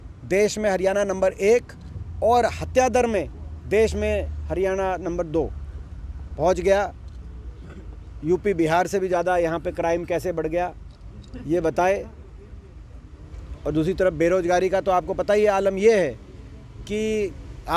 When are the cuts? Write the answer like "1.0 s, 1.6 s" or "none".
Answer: none